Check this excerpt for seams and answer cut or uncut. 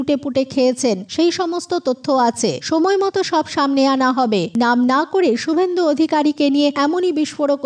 cut